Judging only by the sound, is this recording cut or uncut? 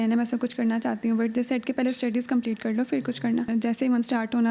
cut